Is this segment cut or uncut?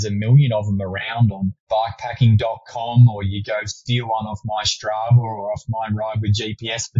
uncut